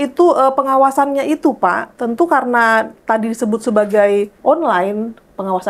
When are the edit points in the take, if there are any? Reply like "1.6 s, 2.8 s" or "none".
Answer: 1.9 s, 4.3 s